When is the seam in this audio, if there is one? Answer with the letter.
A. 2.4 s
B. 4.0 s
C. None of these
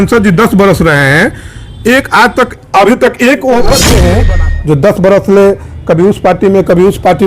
B